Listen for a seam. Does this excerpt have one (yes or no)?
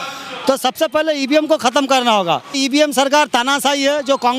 yes